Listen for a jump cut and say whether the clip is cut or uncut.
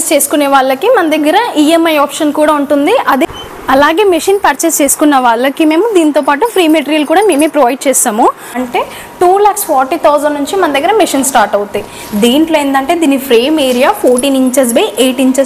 cut